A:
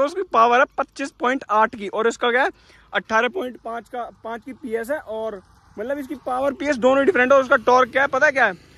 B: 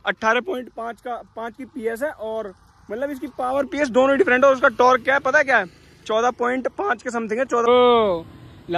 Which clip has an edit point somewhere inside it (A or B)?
B